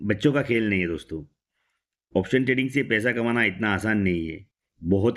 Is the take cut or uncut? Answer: uncut